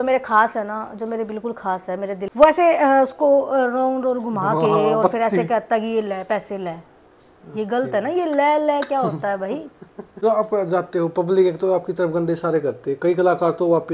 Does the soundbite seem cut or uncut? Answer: cut